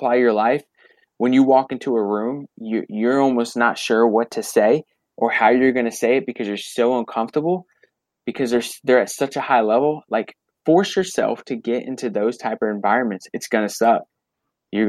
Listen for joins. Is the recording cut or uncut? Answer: uncut